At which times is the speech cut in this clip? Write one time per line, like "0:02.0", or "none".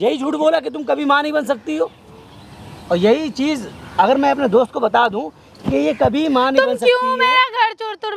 none